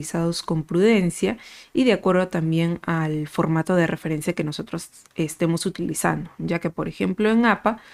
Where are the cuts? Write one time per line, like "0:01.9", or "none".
none